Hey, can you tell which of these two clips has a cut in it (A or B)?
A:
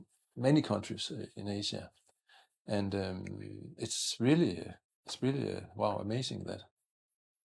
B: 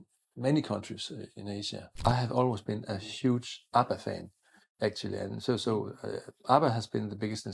B